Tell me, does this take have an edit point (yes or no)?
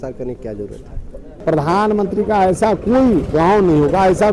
yes